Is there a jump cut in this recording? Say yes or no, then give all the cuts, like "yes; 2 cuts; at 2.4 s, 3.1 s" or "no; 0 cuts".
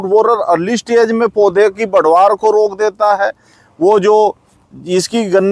no; 0 cuts